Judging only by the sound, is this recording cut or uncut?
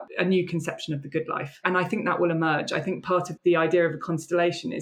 cut